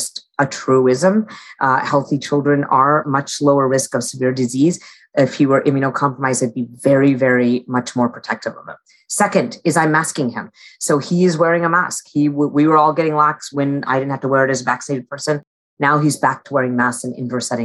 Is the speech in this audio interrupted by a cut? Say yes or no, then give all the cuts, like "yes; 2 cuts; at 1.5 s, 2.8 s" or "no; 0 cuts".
yes; 2 cuts; at 3.0 s, 13.4 s